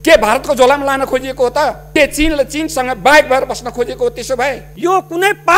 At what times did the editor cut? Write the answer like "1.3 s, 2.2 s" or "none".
1.8 s, 4.7 s

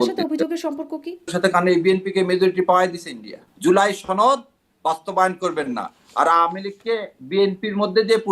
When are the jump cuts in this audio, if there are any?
1.3 s, 3.4 s

